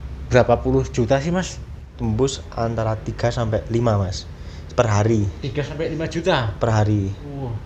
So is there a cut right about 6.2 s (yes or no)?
no